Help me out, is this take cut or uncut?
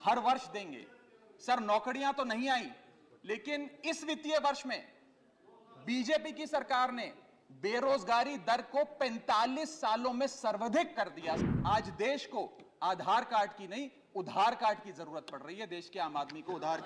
cut